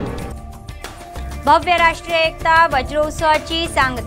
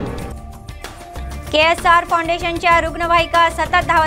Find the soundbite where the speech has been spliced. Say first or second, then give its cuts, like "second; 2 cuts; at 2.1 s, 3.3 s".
second; 1 cut; at 1.1 s